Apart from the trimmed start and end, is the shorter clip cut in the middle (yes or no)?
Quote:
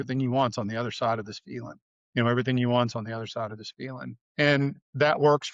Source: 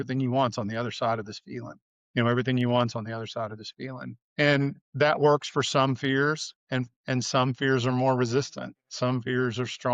no